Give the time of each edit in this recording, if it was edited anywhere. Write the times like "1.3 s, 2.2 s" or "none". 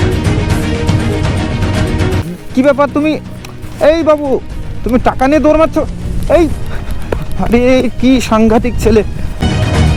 none